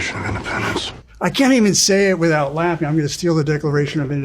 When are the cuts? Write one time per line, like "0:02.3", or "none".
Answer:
0:01.0